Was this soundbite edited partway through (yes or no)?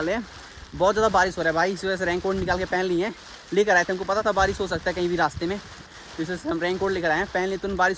no